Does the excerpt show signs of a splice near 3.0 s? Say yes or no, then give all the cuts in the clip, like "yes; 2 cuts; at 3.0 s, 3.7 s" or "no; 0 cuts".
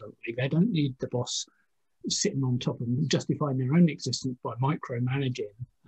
yes; 1 cut; at 3.0 s